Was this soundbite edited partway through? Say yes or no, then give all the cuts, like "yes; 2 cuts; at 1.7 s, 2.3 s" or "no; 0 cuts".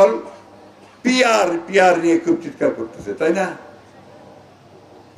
no; 0 cuts